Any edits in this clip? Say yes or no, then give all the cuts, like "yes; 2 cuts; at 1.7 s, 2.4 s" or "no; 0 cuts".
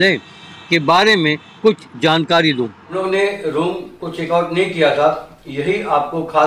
yes; 1 cut; at 3.0 s